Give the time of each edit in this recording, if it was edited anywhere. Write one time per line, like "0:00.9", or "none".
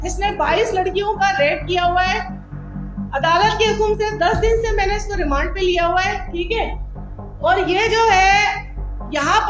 none